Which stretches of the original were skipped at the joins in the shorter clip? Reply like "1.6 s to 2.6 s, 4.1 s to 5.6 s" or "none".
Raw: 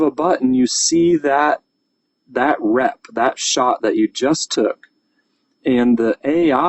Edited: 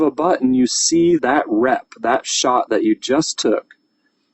1.2 s to 2.3 s